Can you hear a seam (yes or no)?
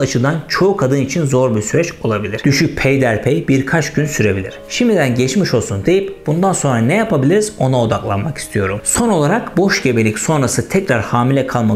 yes